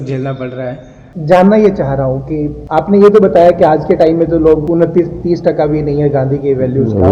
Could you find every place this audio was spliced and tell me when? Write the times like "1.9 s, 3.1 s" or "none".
1.1 s